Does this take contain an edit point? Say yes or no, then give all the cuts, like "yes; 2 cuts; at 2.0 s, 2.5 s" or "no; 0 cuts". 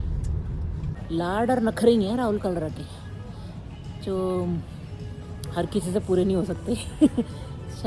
yes; 1 cut; at 1.0 s